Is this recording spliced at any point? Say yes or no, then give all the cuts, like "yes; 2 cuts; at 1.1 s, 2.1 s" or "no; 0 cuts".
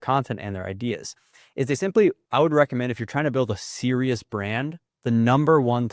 yes; 2 cuts; at 2.2 s, 4.8 s